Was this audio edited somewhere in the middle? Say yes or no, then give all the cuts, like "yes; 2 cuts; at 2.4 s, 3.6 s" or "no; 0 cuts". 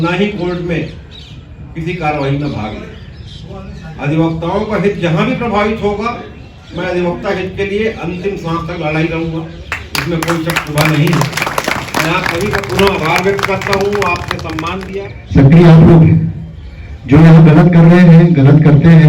yes; 1 cut; at 14.7 s